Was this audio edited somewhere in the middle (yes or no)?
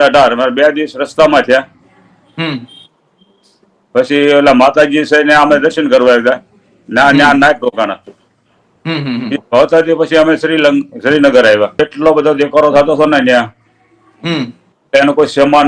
yes